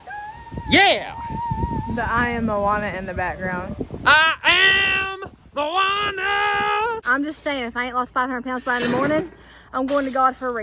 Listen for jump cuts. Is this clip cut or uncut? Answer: cut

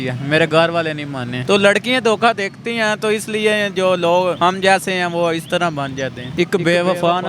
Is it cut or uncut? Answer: cut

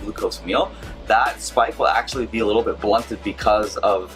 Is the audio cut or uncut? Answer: uncut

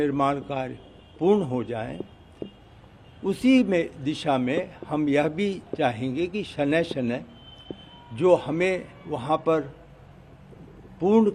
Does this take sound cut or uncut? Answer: uncut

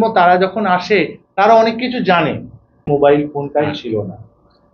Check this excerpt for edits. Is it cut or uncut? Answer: cut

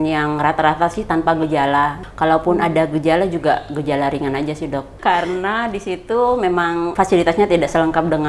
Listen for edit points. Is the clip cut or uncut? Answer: cut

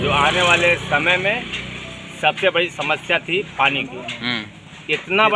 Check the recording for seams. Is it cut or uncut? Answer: uncut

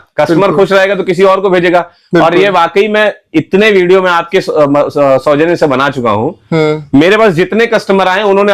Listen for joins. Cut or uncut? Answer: uncut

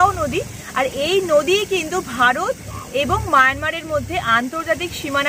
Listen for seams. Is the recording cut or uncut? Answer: uncut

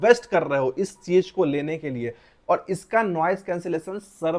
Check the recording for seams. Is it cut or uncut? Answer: cut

